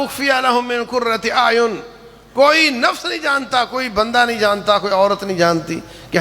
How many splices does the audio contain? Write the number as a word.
zero